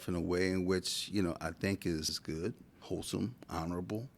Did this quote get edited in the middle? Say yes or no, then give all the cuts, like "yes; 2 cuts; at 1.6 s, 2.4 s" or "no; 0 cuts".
yes; 1 cut; at 2.6 s